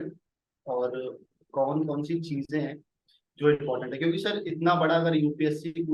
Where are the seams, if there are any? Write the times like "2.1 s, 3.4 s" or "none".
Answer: none